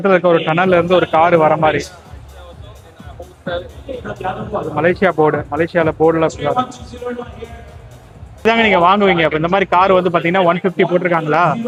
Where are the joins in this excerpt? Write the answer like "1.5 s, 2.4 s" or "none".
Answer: none